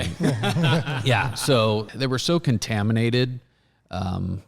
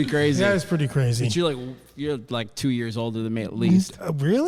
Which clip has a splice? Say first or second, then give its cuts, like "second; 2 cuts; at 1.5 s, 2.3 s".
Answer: first; 1 cut; at 1.9 s